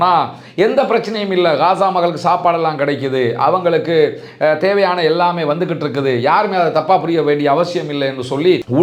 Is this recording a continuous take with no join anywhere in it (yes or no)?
yes